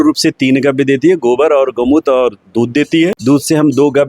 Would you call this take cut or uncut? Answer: cut